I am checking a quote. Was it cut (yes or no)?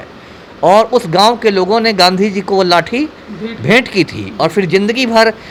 no